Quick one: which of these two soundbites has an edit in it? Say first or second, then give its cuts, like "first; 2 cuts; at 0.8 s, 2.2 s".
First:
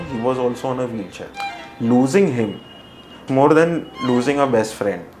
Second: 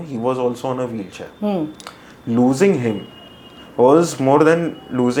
first; 2 cuts; at 1.3 s, 3.2 s